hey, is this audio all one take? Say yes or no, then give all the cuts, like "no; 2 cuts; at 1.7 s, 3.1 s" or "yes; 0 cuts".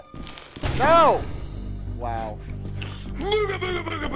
yes; 0 cuts